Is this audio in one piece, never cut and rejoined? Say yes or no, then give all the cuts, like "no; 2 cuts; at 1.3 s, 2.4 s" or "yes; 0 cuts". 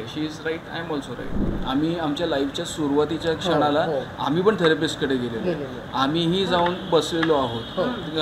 no; 1 cut; at 1.5 s